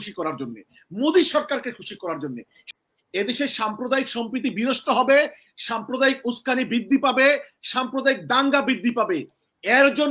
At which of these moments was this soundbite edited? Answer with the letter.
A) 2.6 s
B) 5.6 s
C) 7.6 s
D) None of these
A